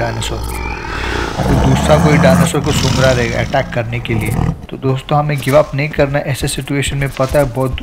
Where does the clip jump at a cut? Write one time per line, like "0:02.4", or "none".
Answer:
none